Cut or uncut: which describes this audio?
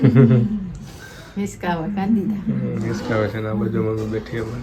uncut